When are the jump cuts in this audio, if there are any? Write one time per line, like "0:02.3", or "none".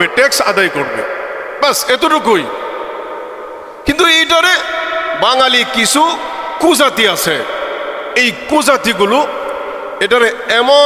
none